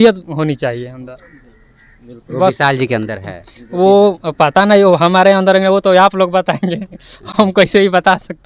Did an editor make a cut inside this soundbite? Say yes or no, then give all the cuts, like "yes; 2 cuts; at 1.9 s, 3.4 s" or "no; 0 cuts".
no; 0 cuts